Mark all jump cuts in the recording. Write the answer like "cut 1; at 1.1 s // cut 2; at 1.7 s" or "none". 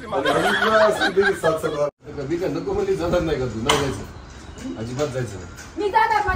cut 1; at 1.9 s